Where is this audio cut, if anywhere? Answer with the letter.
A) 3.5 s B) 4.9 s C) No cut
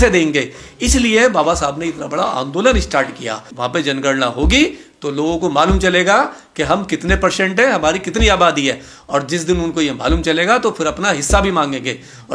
A